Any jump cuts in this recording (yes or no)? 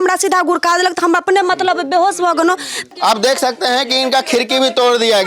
yes